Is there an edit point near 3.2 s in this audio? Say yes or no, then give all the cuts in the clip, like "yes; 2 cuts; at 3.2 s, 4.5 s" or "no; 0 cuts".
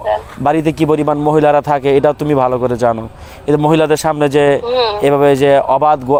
no; 0 cuts